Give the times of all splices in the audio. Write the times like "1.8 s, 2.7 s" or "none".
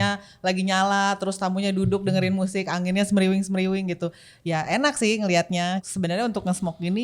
5.8 s

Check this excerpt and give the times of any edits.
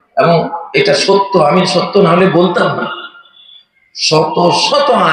none

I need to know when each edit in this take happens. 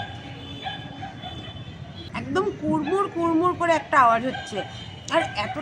2.1 s

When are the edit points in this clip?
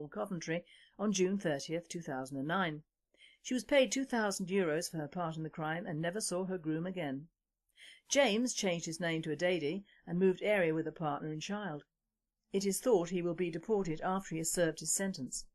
6.9 s

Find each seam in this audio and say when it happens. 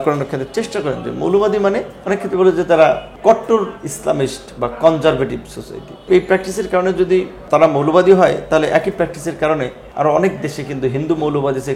1.9 s, 3.1 s, 6.0 s, 7.4 s, 9.8 s

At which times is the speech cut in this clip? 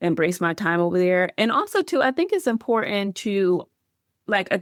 none

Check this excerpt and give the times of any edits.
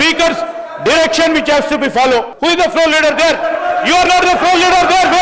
2.3 s

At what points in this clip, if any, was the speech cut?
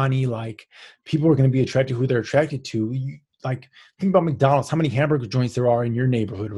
none

